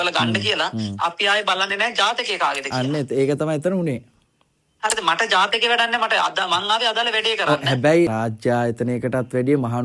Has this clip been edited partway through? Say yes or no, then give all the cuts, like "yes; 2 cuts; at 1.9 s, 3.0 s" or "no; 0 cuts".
no; 0 cuts